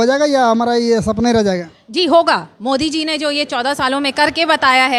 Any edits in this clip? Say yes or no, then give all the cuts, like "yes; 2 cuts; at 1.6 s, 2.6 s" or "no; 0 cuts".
no; 0 cuts